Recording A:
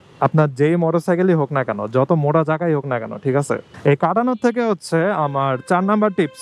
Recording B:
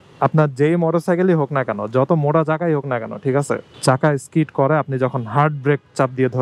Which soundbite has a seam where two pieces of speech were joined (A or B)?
A